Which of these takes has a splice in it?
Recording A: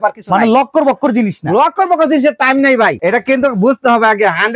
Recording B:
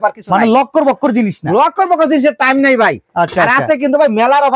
A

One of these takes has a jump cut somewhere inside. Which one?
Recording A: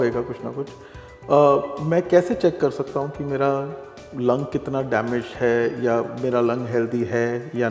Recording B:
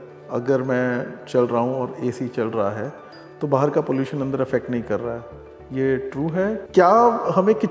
B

